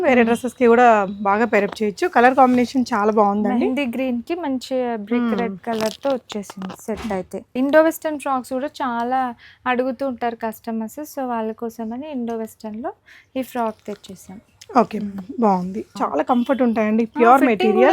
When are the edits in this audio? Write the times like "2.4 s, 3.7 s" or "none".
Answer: 7.5 s, 15.9 s